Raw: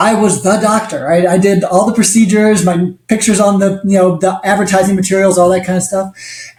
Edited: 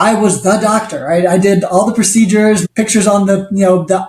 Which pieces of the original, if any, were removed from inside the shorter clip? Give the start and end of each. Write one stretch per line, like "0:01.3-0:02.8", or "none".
0:02.7-0:03.0